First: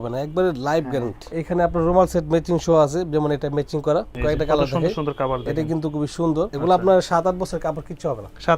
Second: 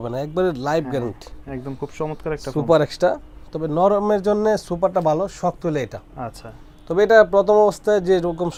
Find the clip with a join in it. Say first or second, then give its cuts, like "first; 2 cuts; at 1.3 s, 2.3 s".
first; 3 cuts; at 1.3 s, 4.1 s, 6.5 s